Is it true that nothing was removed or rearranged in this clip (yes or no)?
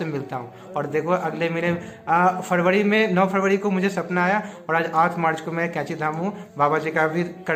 yes